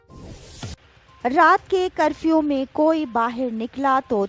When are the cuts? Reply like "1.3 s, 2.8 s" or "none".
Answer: 0.9 s

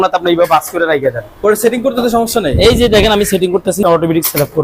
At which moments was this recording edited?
1.3 s, 3.8 s

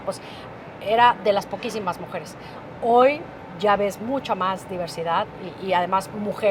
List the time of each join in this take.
none

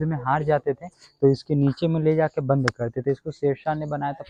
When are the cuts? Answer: none

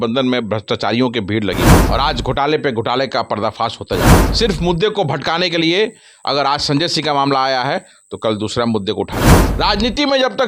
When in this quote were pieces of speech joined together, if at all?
1.8 s, 4.2 s, 9.4 s

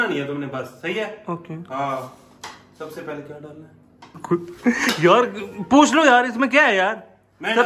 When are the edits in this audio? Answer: none

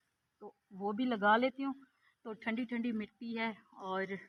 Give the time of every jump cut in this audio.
none

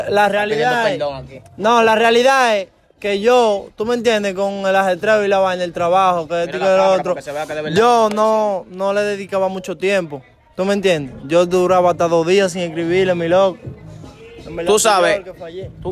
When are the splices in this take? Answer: none

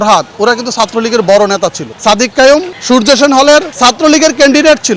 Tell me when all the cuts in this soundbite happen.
1.9 s, 2.7 s, 3.7 s

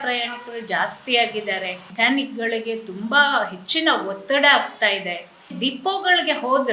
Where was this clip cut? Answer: 1.8 s, 5.5 s

